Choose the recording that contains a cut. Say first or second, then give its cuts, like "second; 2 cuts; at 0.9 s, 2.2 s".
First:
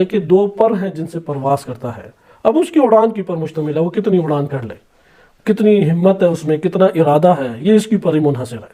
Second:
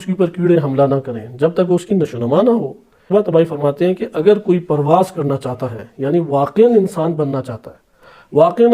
second; 1 cut; at 3.1 s